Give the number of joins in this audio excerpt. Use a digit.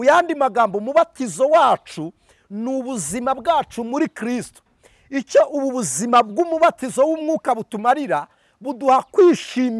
0